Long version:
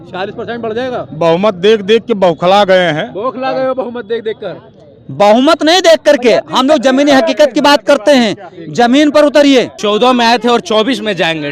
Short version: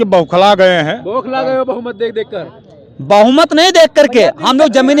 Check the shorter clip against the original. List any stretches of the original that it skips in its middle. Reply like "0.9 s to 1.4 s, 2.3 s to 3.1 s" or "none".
none